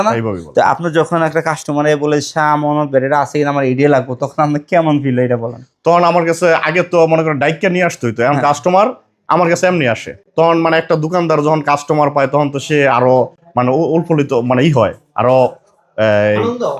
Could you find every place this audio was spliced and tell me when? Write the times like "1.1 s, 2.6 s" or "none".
none